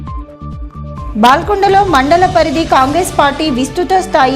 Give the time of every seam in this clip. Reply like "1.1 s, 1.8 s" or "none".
none